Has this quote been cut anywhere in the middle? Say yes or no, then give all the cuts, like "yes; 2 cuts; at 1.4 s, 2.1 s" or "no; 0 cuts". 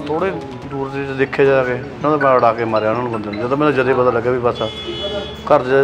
no; 0 cuts